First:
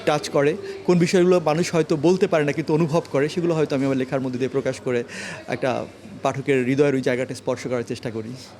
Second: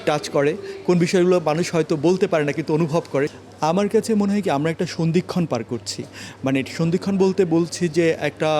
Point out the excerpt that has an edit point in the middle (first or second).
second